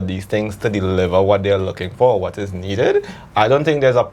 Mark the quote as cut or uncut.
uncut